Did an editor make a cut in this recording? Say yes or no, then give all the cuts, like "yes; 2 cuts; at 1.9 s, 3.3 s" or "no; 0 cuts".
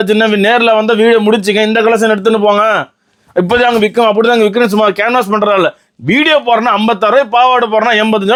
no; 0 cuts